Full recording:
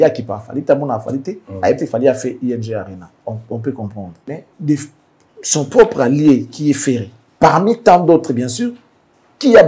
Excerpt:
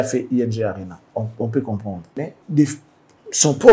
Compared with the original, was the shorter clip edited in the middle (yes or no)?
no